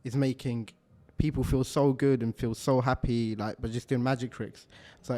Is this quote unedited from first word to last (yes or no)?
yes